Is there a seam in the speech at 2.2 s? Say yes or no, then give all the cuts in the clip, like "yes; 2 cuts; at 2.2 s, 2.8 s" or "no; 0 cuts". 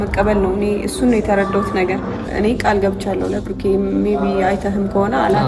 yes; 1 cut; at 2.2 s